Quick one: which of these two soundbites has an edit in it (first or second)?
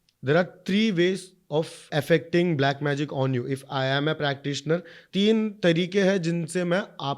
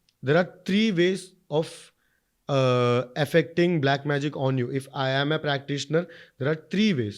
first